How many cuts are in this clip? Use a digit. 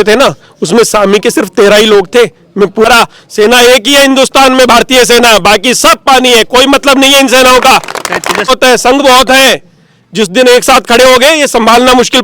2